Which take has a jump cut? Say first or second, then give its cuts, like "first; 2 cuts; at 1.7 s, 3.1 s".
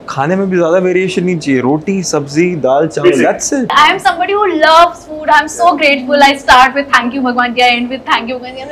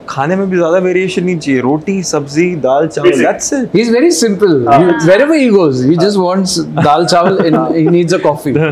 first; 1 cut; at 3.6 s